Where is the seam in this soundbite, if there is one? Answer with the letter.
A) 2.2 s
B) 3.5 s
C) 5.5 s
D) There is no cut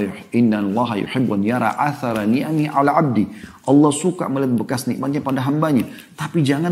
D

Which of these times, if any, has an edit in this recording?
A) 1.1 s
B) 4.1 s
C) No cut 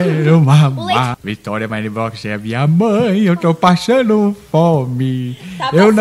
A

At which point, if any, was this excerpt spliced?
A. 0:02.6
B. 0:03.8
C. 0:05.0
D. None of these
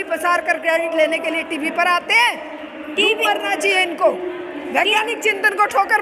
D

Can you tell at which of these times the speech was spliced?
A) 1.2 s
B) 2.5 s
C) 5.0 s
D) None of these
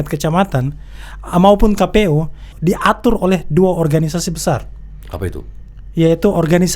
B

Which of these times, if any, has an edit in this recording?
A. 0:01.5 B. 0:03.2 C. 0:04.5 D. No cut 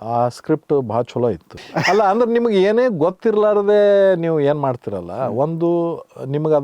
A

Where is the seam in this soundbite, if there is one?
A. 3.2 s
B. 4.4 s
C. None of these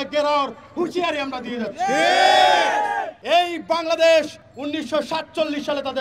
A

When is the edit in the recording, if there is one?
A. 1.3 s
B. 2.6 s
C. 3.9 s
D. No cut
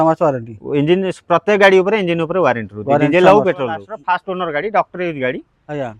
C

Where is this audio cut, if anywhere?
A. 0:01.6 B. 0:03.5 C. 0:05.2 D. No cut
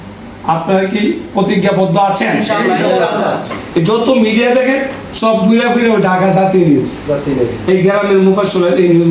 B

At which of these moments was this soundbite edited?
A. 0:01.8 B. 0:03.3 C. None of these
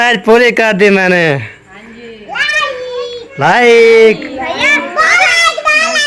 B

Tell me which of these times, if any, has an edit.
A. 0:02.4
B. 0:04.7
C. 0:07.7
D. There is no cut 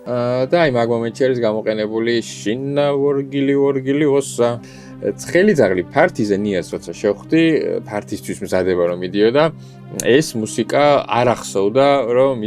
B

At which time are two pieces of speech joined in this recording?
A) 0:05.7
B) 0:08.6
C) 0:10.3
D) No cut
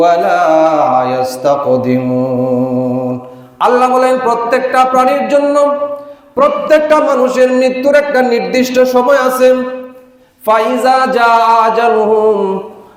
D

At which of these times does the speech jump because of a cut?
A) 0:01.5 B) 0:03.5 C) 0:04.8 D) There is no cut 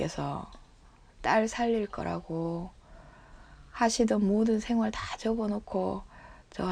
D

